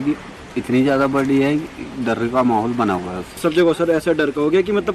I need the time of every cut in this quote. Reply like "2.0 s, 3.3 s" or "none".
3.4 s

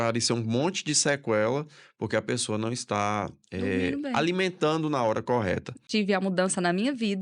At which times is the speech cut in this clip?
5.8 s

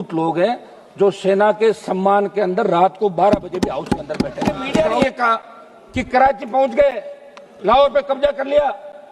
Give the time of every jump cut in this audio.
4.8 s

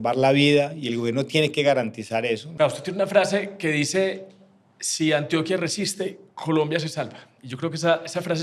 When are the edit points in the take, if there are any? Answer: 2.5 s

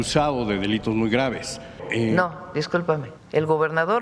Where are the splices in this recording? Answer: 1.8 s, 3.1 s

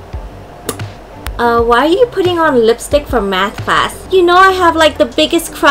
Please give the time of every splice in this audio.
1.1 s, 4.0 s

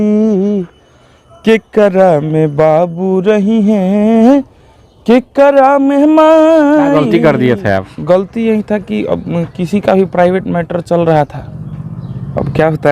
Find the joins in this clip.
7.0 s

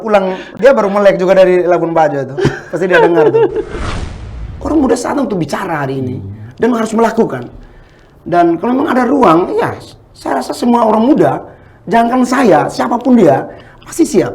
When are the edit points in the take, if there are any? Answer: 4.1 s

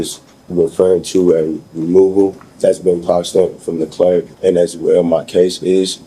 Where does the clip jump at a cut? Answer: 2.4 s, 4.3 s

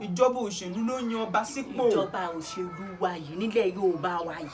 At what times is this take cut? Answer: none

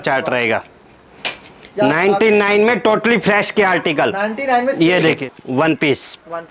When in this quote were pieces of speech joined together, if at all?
5.2 s

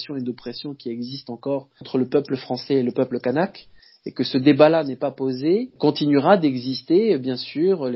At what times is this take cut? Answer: 1.9 s, 5.7 s

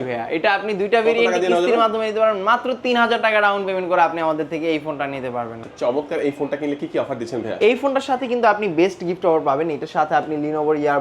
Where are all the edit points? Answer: 5.6 s

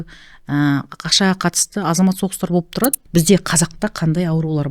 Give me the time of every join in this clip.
3.0 s

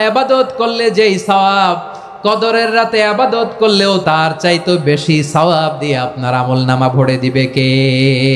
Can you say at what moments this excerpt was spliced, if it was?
4.0 s

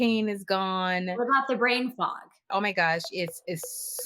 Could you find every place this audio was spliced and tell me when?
2.5 s

